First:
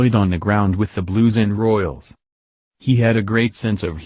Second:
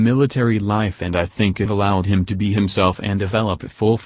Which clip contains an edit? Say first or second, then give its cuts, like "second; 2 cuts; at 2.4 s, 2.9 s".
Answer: first; 1 cut; at 2.2 s